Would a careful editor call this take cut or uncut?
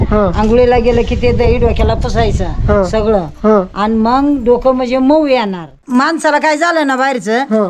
cut